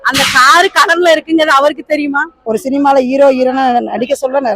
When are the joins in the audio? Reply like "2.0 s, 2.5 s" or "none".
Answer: 2.3 s